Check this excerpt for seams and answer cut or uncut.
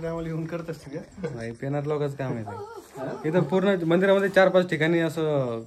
uncut